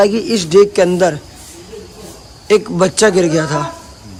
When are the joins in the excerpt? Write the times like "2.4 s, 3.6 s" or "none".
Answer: none